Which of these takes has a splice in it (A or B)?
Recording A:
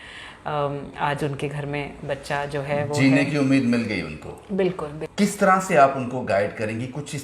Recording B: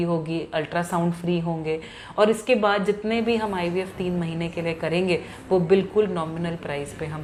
A